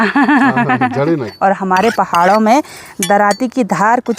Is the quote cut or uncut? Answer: cut